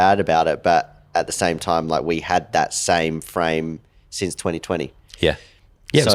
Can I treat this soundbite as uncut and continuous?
yes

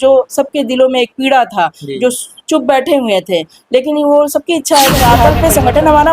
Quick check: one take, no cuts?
no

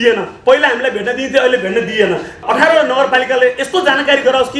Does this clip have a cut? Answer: yes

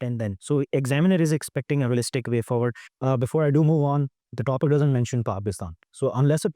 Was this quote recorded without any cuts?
no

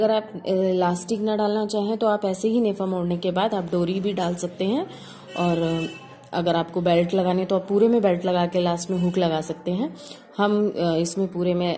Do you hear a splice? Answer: no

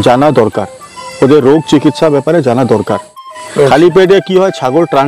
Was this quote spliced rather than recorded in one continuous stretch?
yes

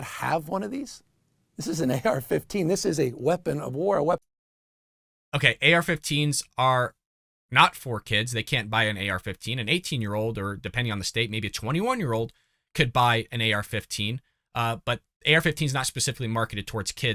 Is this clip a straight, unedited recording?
yes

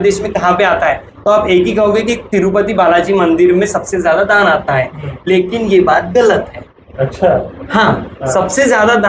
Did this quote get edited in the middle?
no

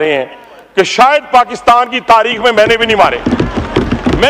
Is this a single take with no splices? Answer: yes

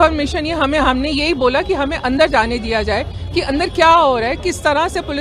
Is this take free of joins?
yes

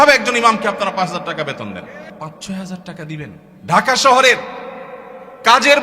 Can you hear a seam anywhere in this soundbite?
yes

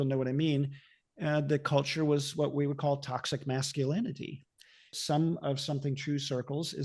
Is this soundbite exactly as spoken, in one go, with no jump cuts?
no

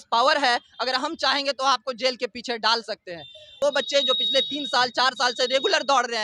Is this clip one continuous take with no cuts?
no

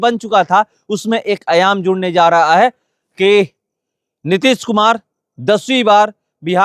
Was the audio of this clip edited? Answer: no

